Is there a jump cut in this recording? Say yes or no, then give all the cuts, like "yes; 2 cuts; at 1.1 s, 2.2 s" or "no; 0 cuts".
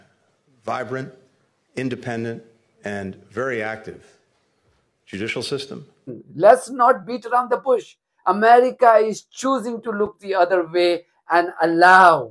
yes; 1 cut; at 6.2 s